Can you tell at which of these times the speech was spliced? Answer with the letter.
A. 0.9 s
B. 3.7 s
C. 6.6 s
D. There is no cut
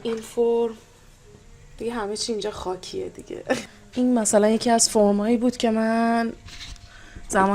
B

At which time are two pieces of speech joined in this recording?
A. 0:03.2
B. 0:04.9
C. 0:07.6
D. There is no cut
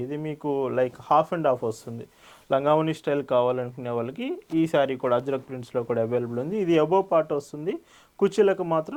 D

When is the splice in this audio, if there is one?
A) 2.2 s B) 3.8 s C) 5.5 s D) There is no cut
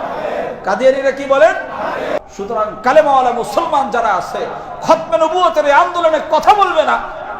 A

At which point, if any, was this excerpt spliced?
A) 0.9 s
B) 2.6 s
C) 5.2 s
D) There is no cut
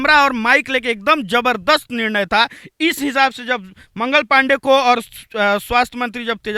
D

